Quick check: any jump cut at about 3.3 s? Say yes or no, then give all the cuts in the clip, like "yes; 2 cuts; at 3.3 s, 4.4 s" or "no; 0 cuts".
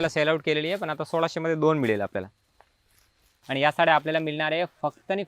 yes; 1 cut; at 3.3 s